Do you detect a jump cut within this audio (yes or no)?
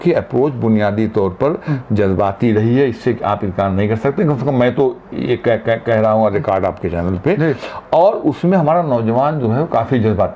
no